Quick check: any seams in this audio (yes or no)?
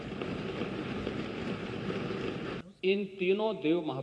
yes